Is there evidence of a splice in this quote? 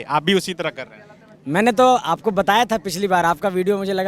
no; 0 cuts

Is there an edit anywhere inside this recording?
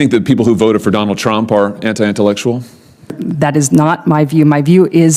yes; 1 cut; at 3.2 s

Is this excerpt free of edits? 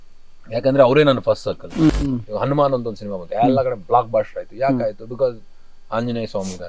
no; 1 cut; at 1.9 s

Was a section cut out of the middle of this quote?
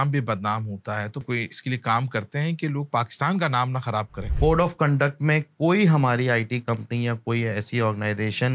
yes; 2 cuts; at 1.2 s, 4.3 s

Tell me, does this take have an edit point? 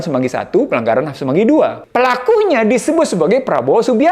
yes; 1 cut; at 1.8 s

